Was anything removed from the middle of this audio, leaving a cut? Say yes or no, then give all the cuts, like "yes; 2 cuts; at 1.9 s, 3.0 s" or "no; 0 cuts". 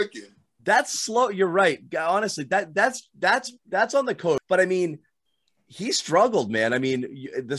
yes; 1 cut; at 4.4 s